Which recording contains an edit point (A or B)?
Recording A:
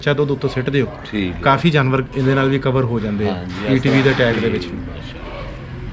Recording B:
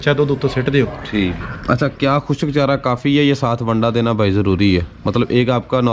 B